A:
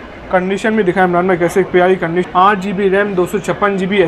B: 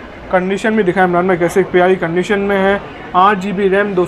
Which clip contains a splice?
A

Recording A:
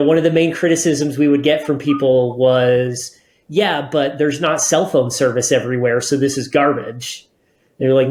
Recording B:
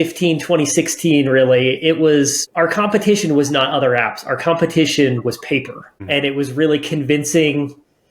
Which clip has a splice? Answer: B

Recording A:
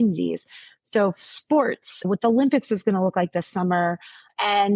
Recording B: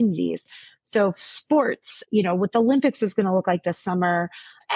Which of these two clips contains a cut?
A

